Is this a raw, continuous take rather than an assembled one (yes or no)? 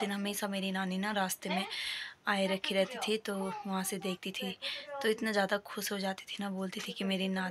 yes